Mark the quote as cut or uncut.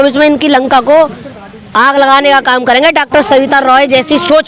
uncut